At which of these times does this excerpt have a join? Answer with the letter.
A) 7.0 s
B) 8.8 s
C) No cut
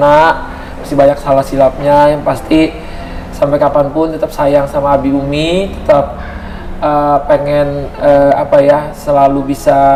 C